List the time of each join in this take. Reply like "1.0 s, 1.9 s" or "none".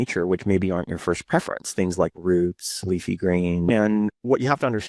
3.7 s